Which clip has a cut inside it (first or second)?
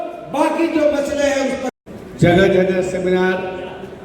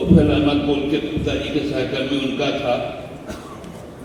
first